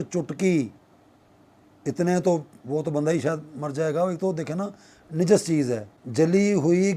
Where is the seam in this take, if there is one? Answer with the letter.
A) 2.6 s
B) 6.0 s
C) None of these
B